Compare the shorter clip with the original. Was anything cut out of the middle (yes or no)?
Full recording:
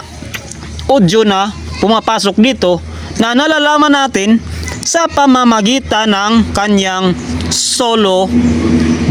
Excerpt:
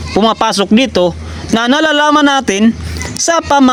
no